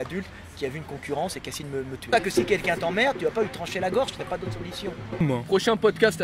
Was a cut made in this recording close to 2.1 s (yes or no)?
yes